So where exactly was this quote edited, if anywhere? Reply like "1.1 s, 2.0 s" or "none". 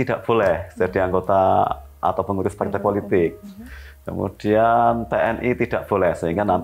none